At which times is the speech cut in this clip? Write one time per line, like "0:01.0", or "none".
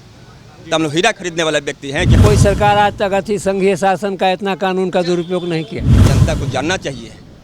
0:02.2
0:06.0